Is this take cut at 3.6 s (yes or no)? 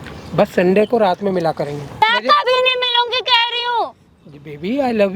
no